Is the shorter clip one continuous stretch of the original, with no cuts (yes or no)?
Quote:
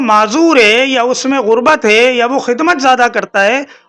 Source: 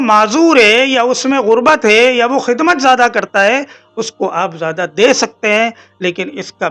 yes